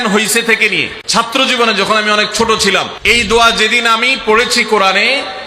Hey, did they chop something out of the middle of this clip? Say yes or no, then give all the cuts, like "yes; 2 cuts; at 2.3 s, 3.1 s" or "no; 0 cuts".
yes; 2 cuts; at 1.3 s, 2.9 s